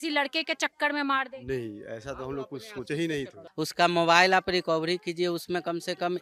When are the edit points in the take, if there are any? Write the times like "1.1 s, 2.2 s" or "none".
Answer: 3.4 s